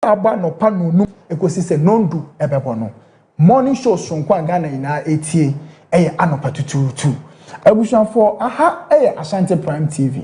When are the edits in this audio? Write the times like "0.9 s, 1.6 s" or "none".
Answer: 1.2 s